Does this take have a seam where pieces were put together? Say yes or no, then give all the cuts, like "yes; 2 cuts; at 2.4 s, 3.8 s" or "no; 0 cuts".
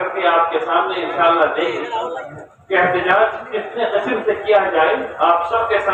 no; 0 cuts